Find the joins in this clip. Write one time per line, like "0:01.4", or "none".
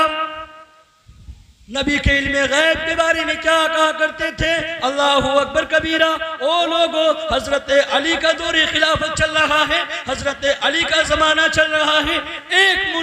none